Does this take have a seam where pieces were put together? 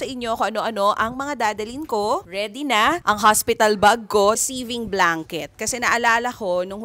yes; 1 cut; at 4.4 s

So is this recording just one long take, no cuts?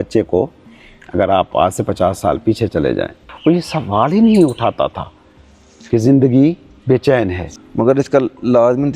no; 2 cuts; at 3.2 s, 7.4 s

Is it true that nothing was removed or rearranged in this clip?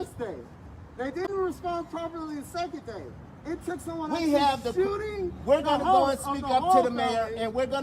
yes; 0 cuts

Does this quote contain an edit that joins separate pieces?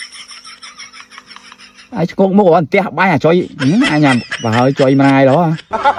no; 0 cuts

